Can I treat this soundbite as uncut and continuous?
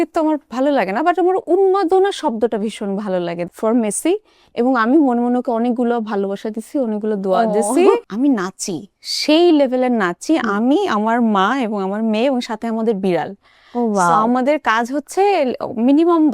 no; 2 cuts; at 3.5 s, 8.1 s

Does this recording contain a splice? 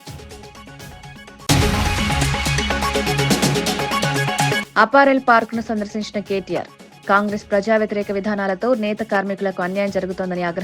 yes; 2 cuts; at 1.4 s, 4.6 s

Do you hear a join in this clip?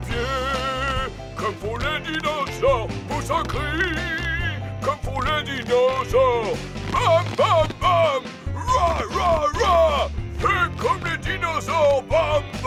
no; 0 cuts

